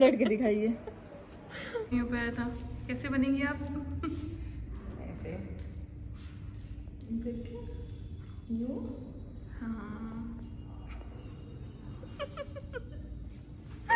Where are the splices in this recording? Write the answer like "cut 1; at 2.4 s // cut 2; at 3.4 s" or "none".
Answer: cut 1; at 1.9 s

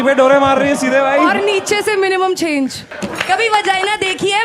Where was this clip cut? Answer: cut 1; at 2.9 s

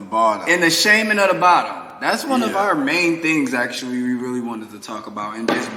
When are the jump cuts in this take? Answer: none

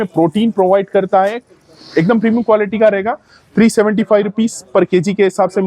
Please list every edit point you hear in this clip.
none

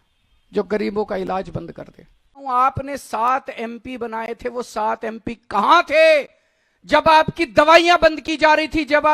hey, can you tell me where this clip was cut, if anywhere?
cut 1; at 2.4 s

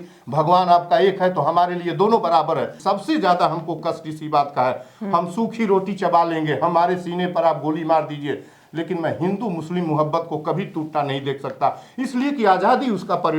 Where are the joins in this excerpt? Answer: cut 1; at 2.7 s

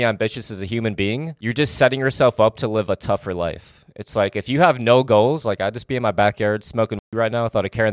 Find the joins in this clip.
cut 1; at 1.3 s

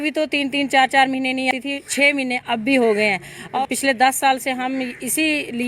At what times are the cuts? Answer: cut 1; at 1.5 s // cut 2; at 3.5 s

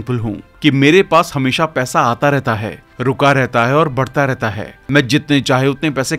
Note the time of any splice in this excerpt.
none

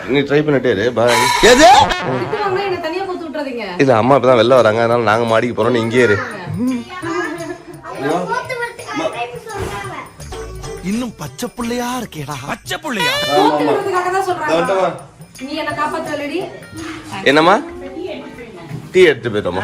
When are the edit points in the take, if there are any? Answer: none

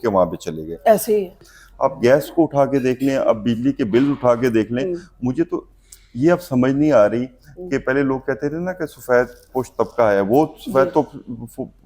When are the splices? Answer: cut 1; at 1.5 s

